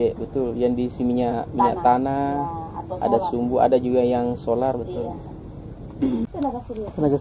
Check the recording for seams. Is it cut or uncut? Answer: cut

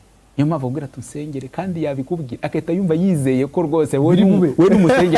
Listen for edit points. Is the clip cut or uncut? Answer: uncut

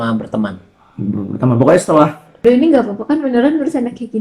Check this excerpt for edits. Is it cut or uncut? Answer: cut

